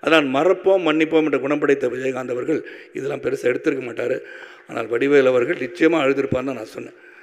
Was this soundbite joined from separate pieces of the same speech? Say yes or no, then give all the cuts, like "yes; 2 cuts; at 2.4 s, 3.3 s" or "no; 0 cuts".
no; 0 cuts